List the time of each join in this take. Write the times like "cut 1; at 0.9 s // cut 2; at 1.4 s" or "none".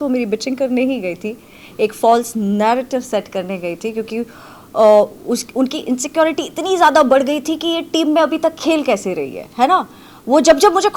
none